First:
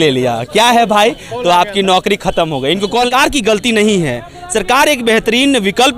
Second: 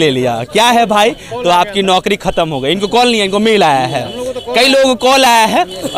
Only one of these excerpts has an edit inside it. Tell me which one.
first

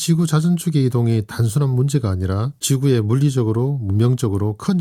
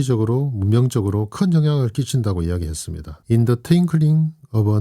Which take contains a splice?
second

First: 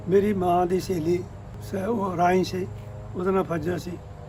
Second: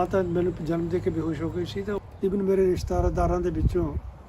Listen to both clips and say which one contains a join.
second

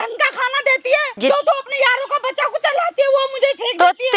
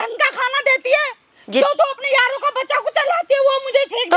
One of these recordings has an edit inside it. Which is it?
first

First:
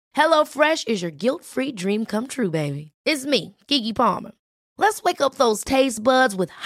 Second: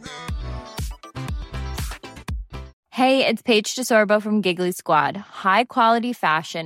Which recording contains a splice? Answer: second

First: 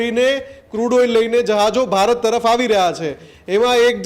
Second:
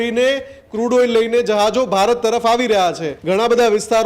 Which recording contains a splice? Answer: second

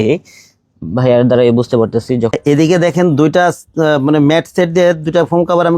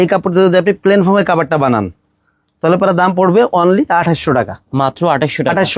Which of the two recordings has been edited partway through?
first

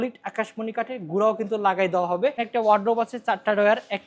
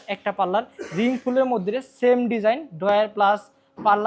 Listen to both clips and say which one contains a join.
first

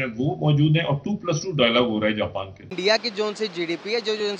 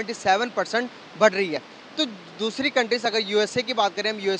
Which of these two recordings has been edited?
first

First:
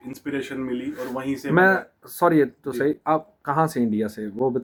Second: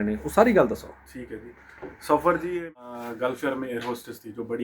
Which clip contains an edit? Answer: second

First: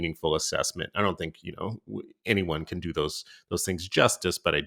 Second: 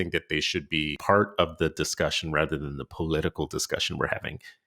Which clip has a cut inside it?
second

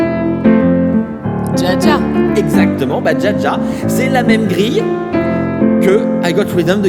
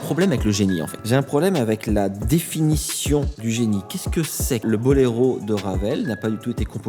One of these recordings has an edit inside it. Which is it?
second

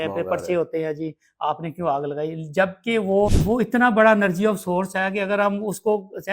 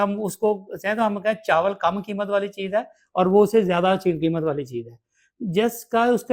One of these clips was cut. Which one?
first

